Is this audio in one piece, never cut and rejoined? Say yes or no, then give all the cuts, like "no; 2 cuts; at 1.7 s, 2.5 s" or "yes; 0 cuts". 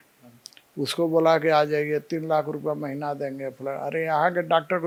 yes; 0 cuts